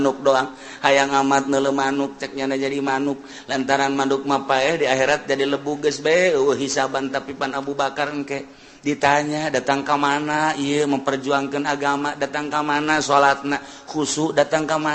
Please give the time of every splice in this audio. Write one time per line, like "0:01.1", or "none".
none